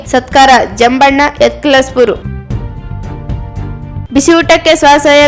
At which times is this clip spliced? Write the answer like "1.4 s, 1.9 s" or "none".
2.2 s, 4.0 s